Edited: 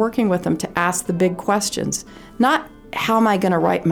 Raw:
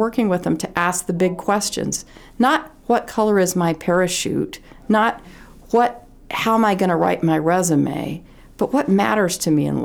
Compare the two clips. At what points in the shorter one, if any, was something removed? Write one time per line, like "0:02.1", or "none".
0:02.7